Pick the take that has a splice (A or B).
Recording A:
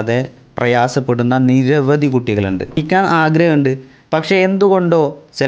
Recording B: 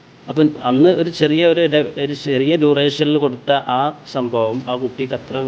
A